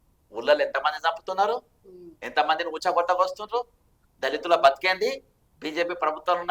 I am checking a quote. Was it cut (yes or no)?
no